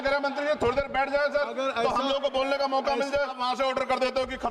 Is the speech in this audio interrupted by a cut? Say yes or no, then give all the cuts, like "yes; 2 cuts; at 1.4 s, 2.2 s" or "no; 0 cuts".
yes; 1 cut; at 3.4 s